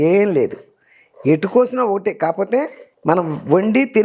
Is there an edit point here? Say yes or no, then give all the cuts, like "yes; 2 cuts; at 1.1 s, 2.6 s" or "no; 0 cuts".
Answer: no; 0 cuts